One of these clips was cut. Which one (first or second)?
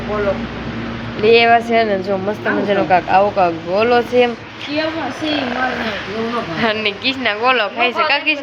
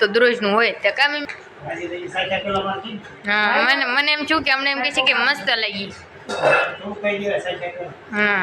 second